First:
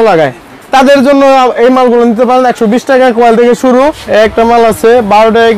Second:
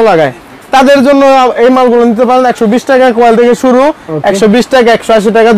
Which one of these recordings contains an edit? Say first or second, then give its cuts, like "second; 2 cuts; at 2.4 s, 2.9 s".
first; 1 cut; at 4.0 s